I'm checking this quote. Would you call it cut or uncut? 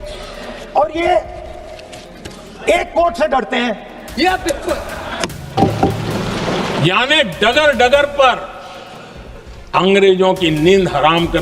cut